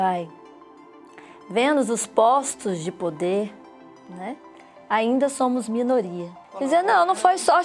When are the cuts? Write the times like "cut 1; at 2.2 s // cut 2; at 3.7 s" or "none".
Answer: cut 1; at 6.4 s